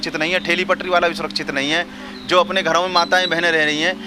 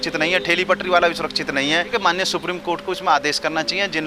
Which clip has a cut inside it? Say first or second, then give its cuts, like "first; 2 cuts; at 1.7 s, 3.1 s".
second; 1 cut; at 1.9 s